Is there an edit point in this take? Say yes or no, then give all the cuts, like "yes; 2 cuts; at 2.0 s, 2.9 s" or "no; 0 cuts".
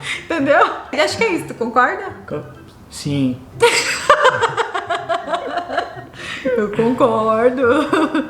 yes; 1 cut; at 0.9 s